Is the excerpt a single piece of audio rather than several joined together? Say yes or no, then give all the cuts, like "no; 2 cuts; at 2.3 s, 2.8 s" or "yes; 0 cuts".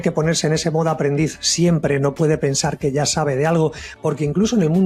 yes; 0 cuts